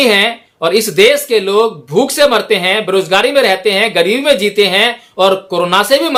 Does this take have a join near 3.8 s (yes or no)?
no